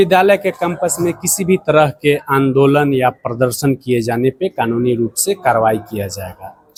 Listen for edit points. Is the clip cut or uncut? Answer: uncut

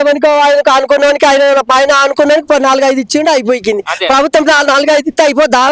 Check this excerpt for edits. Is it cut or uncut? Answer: uncut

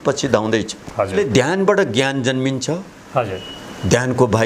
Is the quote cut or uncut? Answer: cut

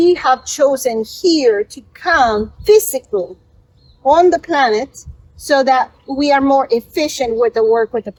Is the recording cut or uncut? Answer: uncut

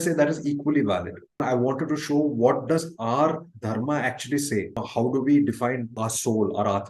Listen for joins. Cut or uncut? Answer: cut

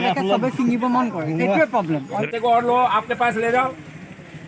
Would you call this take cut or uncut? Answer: cut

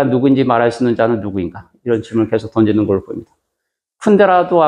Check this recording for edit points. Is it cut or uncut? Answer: uncut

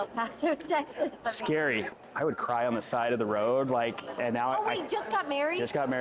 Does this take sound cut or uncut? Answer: cut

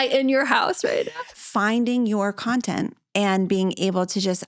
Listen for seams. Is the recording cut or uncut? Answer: cut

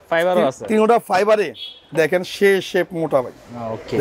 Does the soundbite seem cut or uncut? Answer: uncut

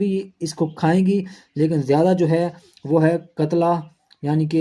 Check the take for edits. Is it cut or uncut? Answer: uncut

